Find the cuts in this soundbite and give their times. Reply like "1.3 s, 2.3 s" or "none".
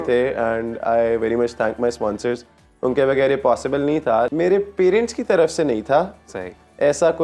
4.3 s